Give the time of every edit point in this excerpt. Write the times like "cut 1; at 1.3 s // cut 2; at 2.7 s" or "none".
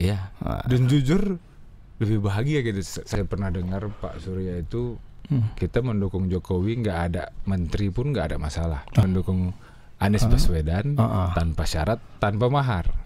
cut 1; at 3.1 s // cut 2; at 9.0 s

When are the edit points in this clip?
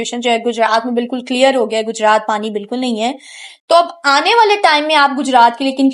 none

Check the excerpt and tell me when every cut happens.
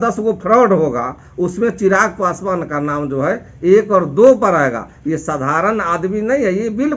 none

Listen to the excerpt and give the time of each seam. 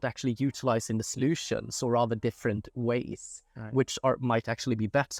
none

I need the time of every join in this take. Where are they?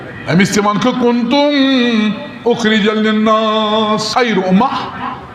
cut 1; at 4.1 s

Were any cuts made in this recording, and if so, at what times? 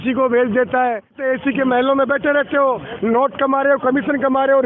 cut 1; at 1.2 s

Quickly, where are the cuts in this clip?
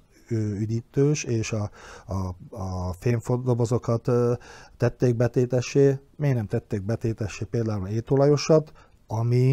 none

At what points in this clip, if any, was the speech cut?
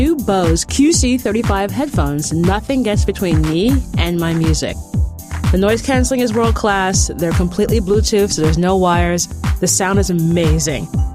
none

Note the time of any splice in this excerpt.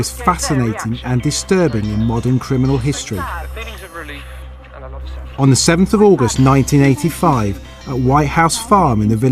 cut 1; at 1.4 s

